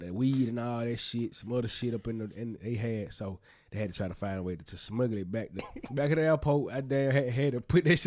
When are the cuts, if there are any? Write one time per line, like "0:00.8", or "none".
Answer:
0:05.7